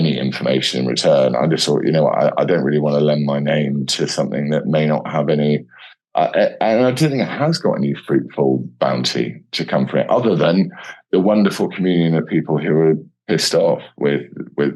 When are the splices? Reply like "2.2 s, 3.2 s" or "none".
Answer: none

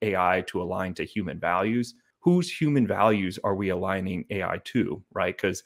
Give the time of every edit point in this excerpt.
2.0 s

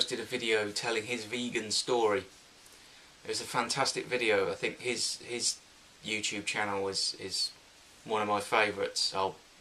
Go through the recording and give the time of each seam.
6.7 s

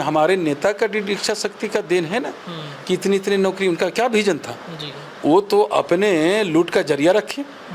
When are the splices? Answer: none

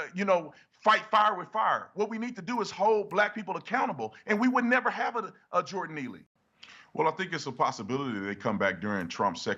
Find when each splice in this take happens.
6.3 s

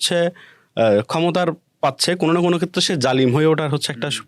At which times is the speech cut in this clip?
none

